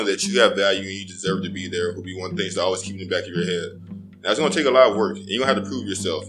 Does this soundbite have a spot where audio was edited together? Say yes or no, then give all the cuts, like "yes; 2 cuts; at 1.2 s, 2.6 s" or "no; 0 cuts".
no; 0 cuts